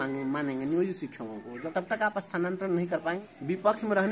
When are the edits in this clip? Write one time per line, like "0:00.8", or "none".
0:01.6
0:03.2